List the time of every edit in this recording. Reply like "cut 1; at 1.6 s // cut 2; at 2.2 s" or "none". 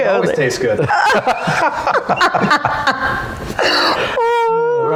none